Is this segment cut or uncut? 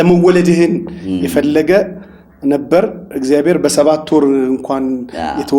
uncut